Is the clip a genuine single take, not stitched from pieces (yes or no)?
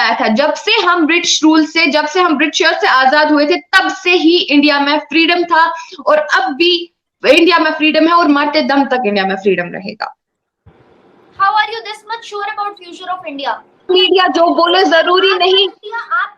no